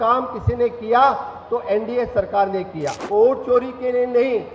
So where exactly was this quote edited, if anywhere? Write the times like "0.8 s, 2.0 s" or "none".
3.0 s